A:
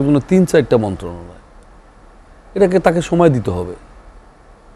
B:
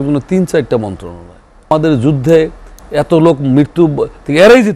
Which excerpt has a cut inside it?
B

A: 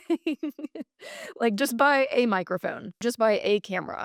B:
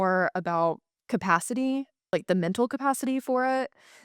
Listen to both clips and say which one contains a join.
B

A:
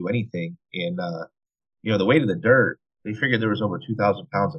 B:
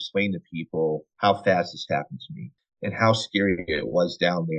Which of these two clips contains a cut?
B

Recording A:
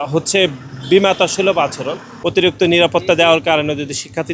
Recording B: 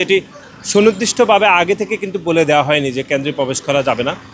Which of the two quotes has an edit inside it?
A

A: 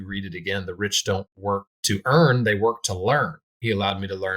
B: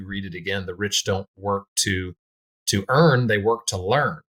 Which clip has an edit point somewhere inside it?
A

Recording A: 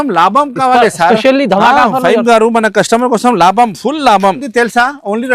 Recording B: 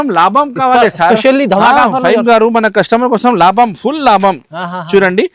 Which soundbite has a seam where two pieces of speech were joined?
A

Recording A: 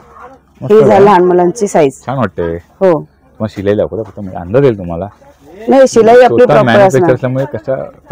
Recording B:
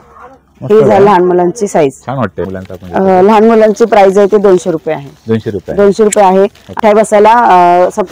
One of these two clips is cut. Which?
B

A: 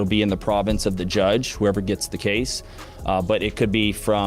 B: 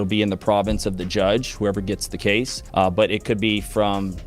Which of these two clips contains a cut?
B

